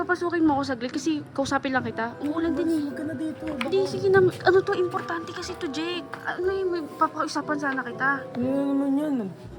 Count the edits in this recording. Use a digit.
2